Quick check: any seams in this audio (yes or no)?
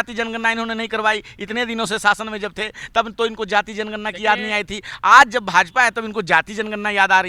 no